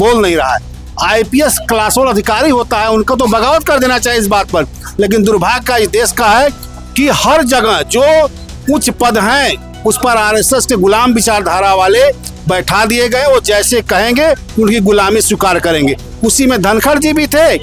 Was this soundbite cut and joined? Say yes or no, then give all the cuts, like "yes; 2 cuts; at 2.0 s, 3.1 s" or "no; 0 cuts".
no; 0 cuts